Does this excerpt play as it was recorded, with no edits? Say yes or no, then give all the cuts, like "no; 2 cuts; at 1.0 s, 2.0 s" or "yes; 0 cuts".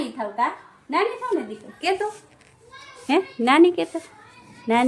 yes; 0 cuts